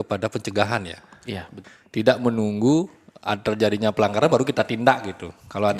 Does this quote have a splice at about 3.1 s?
no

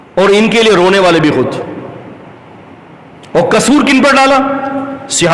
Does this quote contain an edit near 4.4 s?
no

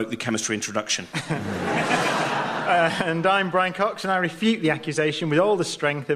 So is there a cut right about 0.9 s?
yes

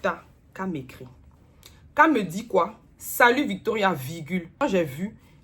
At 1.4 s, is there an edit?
no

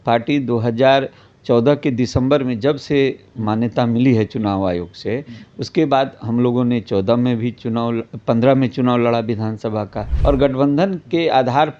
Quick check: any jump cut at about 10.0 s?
yes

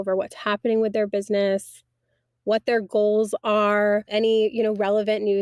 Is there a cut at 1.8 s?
no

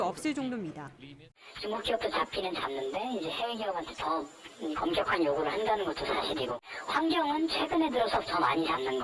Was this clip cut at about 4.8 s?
no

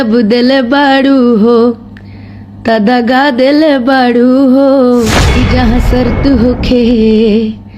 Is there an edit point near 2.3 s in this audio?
no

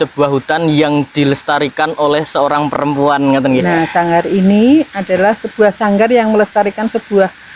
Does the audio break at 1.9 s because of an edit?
no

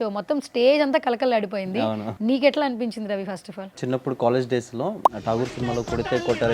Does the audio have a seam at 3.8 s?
yes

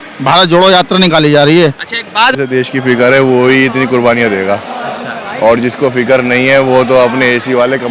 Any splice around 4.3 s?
no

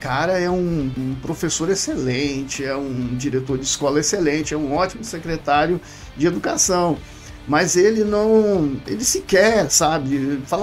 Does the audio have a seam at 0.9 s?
yes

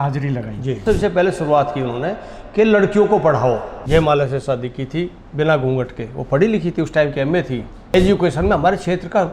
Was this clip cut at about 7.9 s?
yes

